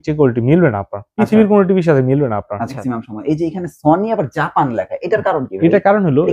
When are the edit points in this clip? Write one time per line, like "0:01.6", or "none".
0:02.9